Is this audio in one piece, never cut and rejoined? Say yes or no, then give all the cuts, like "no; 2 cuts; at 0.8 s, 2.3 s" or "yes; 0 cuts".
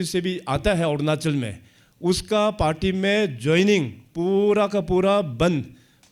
yes; 0 cuts